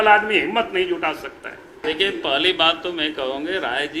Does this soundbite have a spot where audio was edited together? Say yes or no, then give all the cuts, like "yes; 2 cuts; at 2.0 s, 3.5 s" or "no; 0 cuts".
yes; 1 cut; at 1.8 s